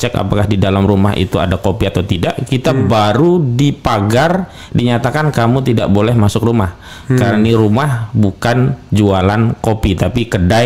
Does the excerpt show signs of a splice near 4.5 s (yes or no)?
no